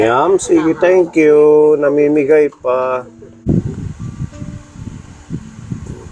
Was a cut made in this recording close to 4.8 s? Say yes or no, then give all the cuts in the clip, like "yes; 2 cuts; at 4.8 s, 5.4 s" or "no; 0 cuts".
no; 1 cut; at 3.4 s